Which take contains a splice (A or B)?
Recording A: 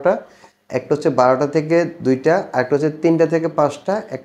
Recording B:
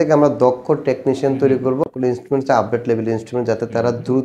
B